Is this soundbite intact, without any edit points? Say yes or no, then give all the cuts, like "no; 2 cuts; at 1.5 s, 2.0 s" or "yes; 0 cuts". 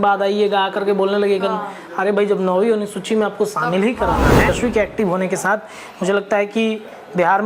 no; 1 cut; at 4.5 s